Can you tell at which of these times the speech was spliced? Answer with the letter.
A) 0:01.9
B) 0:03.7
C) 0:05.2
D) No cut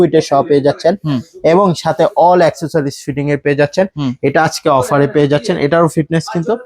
D